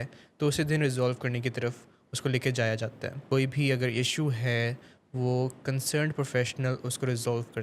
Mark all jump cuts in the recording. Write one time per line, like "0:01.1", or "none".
0:03.2